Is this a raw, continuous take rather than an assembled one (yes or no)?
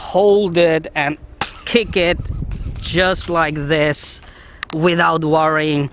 yes